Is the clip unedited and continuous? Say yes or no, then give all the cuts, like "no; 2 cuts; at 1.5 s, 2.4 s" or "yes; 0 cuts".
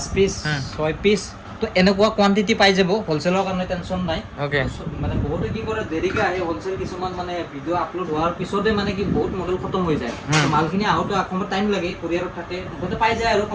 yes; 0 cuts